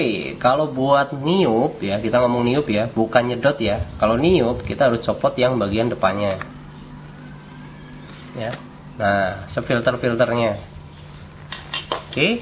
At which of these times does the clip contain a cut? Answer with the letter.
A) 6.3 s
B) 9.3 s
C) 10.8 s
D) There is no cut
D